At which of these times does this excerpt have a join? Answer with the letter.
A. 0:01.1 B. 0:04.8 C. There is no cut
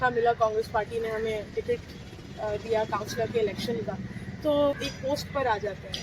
B